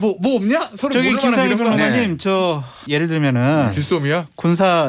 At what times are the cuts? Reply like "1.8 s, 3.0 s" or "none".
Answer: 2.8 s